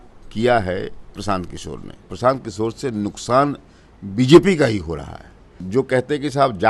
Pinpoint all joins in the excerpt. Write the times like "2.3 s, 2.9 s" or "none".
2.0 s, 5.6 s